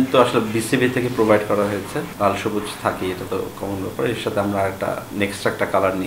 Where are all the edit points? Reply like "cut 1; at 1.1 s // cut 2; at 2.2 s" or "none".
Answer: cut 1; at 2.1 s // cut 2; at 5.1 s